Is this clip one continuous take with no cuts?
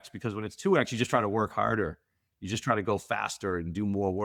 yes; 0 cuts

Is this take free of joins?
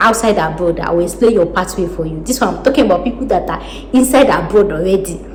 yes; 0 cuts

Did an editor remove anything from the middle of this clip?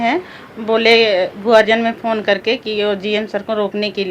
no; 0 cuts

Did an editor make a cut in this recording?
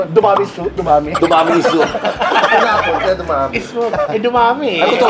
no; 0 cuts

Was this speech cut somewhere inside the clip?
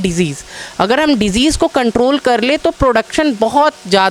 no; 0 cuts

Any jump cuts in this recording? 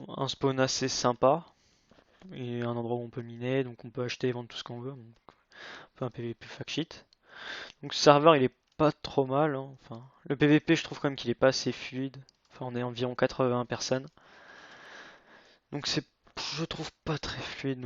yes; 1 cut; at 3.9 s

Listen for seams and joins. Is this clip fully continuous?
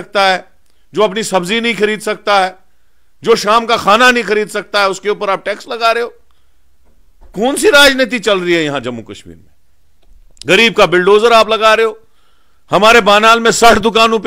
yes; 0 cuts

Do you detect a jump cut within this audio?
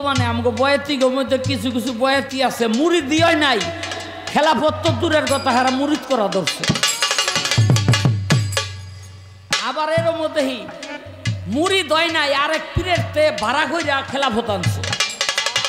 no; 0 cuts

